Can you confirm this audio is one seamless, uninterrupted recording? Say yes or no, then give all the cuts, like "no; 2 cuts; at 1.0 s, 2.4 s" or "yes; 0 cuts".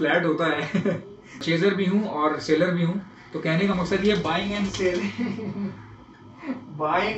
no; 1 cut; at 1.4 s